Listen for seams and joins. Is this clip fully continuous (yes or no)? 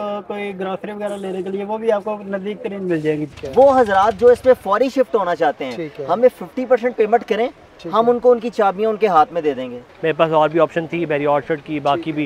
no